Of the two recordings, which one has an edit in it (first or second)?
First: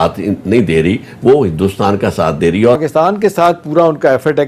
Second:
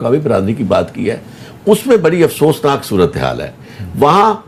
first